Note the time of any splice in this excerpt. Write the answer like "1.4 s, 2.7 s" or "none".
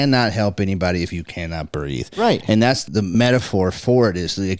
3.1 s